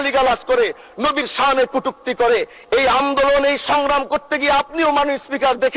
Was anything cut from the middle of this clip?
no; 0 cuts

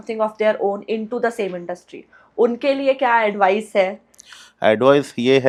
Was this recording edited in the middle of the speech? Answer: no; 0 cuts

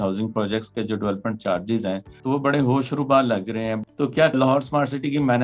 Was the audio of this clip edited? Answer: yes; 2 cuts; at 2.1 s, 4.3 s

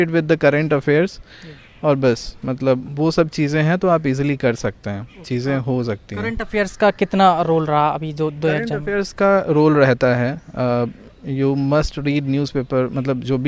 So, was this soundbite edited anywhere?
no; 0 cuts

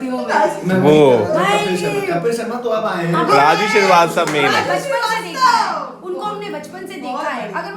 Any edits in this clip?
no; 0 cuts

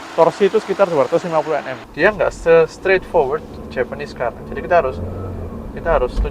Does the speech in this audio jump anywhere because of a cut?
yes; 1 cut; at 1.8 s

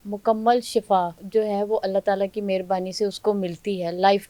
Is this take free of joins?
yes; 0 cuts

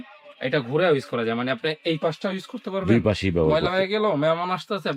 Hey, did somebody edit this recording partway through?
no; 0 cuts

